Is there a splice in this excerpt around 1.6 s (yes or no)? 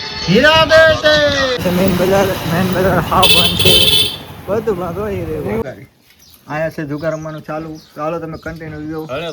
yes